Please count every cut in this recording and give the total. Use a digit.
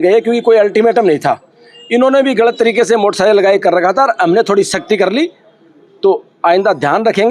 0